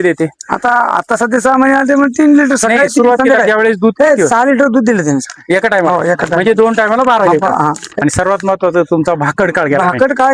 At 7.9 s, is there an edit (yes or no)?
yes